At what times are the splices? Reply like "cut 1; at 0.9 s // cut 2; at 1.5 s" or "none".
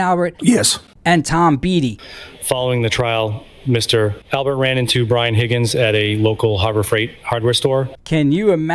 cut 1; at 2.0 s // cut 2; at 7.9 s